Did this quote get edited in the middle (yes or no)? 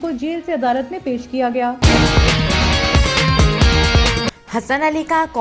yes